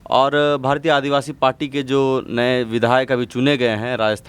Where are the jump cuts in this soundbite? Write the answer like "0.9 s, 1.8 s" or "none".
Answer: none